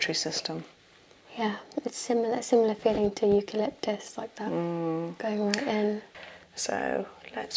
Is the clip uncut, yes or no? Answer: no